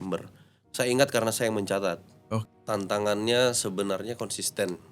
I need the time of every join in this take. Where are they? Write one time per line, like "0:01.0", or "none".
0:02.4